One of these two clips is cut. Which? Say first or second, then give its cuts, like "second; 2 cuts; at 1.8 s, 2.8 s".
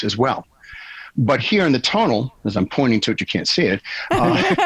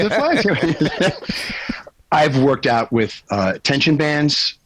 second; 1 cut; at 3.2 s